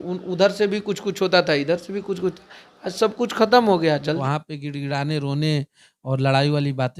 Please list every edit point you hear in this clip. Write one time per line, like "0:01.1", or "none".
0:04.2